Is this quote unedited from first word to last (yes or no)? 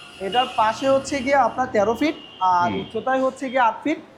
yes